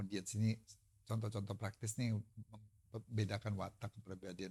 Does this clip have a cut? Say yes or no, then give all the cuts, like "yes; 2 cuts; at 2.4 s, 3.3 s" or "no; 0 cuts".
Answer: no; 0 cuts